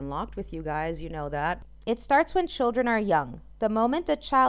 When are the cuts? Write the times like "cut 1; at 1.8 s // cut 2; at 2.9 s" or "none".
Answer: cut 1; at 1.7 s